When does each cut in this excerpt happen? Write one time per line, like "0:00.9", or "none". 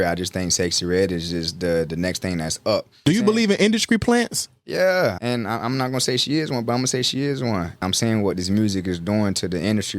0:03.0
0:05.2
0:07.8

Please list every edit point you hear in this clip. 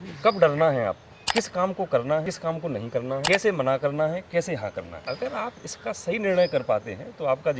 0:01.1
0:02.8
0:04.9

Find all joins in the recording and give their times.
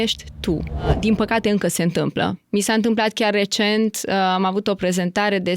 0:00.9

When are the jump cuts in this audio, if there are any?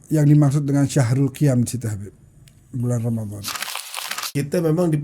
0:04.0

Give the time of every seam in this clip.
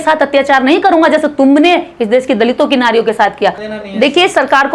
0:03.6

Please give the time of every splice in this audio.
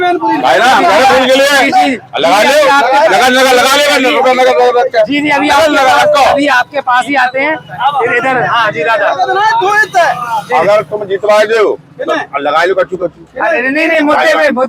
none

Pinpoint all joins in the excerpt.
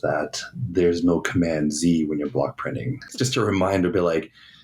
0:03.1

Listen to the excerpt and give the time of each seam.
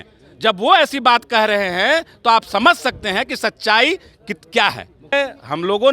0:05.0

